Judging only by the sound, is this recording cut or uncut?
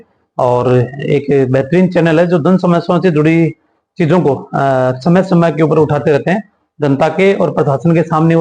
uncut